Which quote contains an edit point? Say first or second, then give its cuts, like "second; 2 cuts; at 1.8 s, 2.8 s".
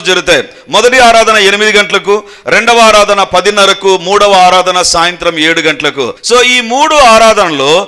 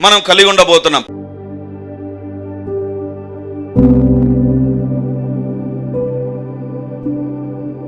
second; 1 cut; at 1.1 s